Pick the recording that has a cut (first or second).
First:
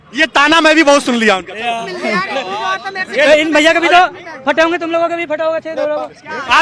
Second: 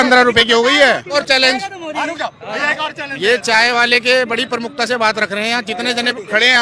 second